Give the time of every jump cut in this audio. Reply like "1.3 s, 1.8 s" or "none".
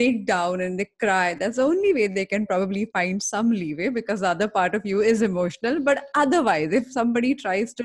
none

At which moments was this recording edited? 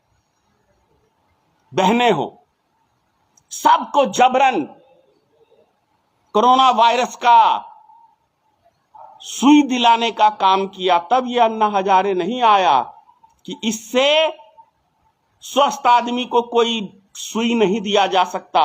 none

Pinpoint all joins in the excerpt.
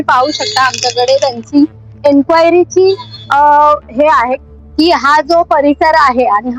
4.4 s

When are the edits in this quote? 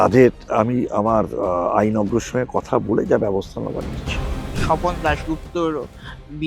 4.4 s

